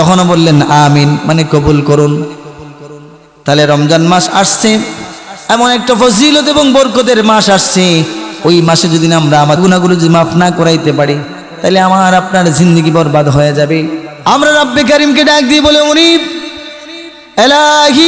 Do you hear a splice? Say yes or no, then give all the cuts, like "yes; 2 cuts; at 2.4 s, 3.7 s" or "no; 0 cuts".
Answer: yes; 2 cuts; at 9.6 s, 14.1 s